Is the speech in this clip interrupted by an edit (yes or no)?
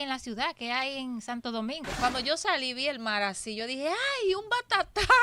yes